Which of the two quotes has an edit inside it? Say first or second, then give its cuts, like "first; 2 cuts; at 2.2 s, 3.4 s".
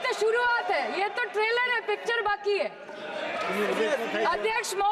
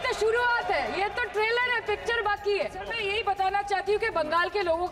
second; 1 cut; at 3.0 s